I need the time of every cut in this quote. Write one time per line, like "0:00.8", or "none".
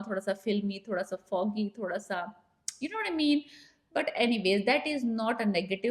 none

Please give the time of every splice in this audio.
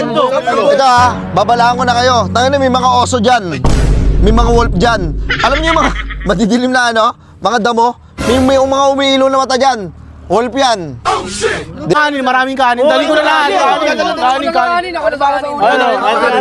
0:11.9

